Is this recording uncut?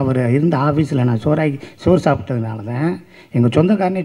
yes; 0 cuts

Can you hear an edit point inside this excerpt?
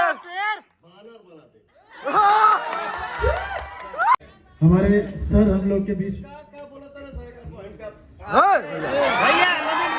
yes; 1 cut; at 4.2 s

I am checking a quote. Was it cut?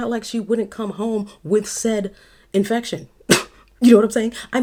no; 0 cuts

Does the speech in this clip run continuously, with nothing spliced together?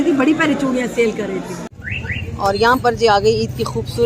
no; 1 cut; at 1.7 s

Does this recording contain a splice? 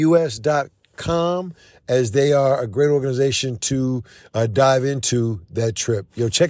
no; 0 cuts

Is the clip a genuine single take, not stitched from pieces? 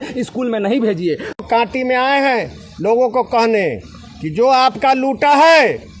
no; 1 cut; at 1.4 s

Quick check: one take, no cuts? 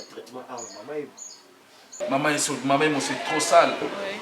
no; 1 cut; at 2.0 s

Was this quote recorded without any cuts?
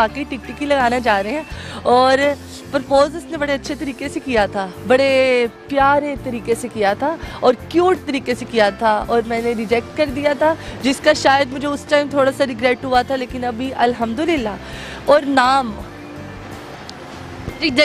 yes; 0 cuts

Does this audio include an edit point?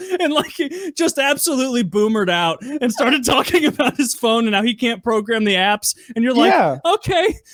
no; 0 cuts

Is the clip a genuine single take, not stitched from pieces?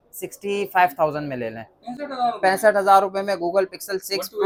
yes; 0 cuts

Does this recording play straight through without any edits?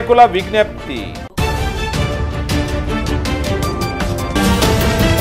yes; 0 cuts

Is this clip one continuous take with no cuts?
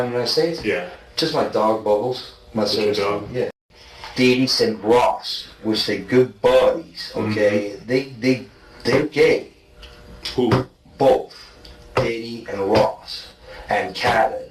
no; 1 cut; at 3.5 s

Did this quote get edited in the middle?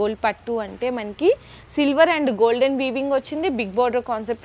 no; 0 cuts

